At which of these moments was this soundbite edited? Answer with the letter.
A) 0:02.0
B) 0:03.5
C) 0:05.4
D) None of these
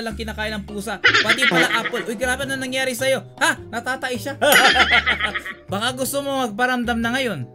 C